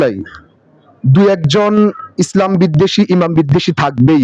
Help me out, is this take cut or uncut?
uncut